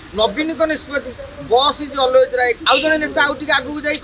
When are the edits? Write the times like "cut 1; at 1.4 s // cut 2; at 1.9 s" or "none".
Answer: cut 1; at 2.6 s